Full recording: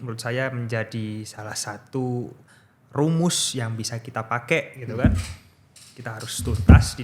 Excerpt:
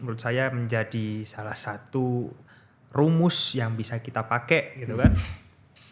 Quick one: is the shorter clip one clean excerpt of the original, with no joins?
yes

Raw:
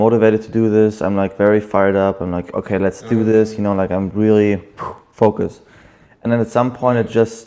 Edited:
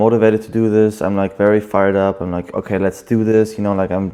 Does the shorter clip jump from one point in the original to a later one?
no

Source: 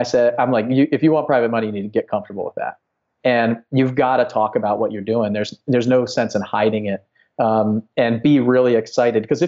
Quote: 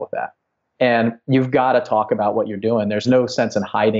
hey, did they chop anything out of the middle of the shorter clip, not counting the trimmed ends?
yes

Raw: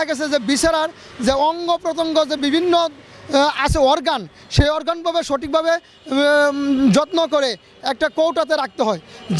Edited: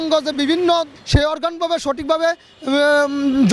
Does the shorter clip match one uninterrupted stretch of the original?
no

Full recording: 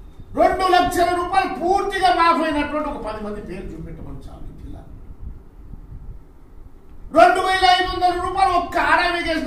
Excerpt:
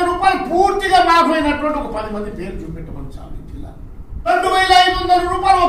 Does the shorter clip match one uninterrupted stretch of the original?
no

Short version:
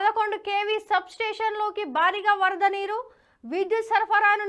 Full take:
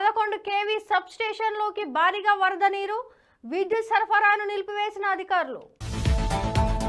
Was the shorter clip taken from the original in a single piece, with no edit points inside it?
yes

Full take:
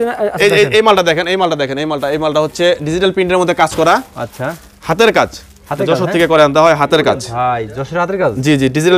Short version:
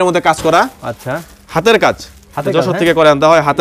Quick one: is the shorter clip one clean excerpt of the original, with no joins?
yes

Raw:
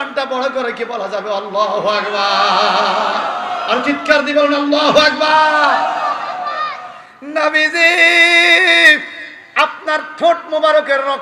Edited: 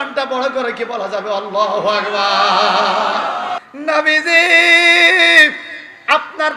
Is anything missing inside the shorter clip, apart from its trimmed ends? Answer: yes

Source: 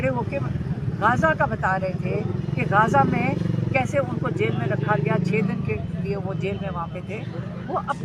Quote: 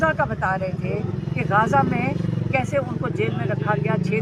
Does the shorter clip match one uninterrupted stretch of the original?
yes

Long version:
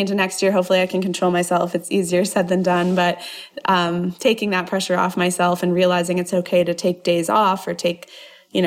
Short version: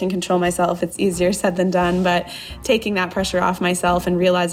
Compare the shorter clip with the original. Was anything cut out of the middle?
yes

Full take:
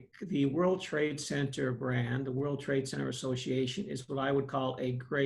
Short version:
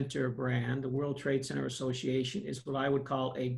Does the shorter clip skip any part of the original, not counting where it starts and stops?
no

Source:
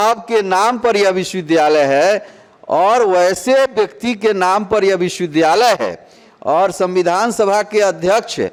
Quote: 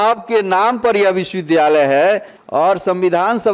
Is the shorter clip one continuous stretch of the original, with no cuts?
no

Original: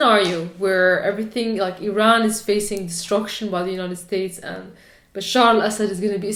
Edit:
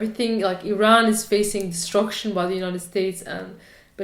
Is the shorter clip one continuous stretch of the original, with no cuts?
yes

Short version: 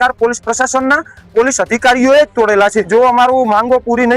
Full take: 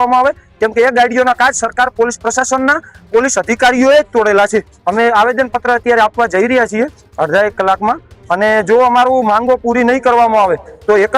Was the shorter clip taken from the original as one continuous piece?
no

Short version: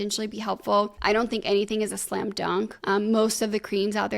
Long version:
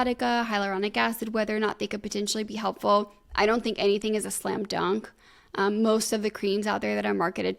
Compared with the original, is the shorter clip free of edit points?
no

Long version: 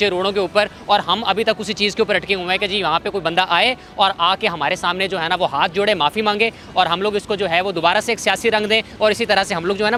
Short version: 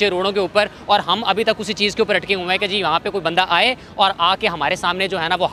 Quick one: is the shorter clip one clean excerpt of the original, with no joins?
yes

